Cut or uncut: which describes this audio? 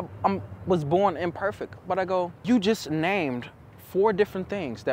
cut